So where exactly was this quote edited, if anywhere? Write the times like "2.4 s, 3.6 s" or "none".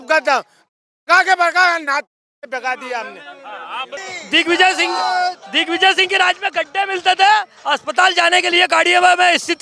4.0 s